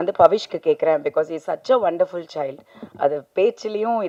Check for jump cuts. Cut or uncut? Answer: uncut